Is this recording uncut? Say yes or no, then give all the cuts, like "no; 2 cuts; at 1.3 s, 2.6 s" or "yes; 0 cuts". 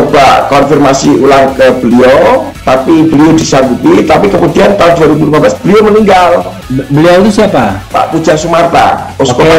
yes; 0 cuts